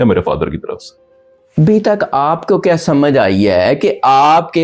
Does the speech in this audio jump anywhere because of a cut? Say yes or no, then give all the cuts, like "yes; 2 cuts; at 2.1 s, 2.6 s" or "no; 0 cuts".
no; 0 cuts